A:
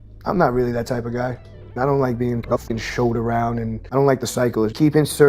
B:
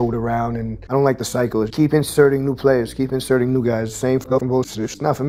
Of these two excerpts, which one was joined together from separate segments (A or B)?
A